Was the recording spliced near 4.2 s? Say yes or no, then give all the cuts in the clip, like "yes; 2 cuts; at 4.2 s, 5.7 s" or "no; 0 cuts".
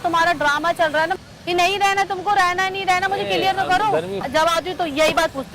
yes; 2 cuts; at 1.1 s, 4.2 s